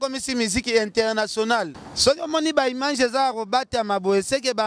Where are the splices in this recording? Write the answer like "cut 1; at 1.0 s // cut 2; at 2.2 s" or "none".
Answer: cut 1; at 1.8 s